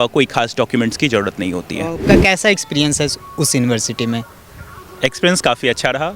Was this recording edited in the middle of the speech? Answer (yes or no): yes